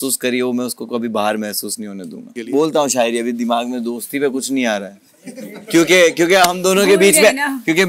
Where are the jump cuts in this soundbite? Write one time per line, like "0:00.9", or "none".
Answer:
0:02.3